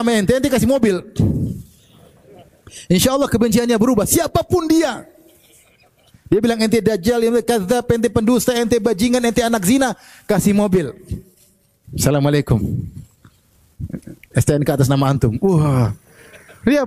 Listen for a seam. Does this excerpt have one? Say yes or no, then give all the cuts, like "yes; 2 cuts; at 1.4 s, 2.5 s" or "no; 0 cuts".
no; 0 cuts